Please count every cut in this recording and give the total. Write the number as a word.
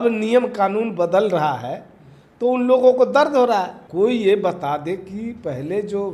one